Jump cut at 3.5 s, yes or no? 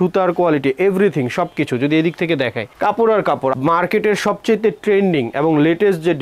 yes